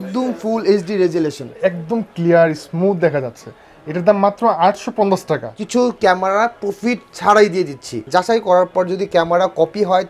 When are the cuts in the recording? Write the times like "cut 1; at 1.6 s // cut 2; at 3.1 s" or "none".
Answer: cut 1; at 1.5 s // cut 2; at 5.5 s // cut 3; at 7.9 s